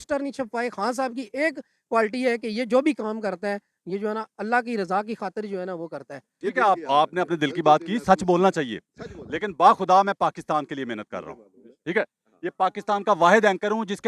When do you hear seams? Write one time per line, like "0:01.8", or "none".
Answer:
0:06.5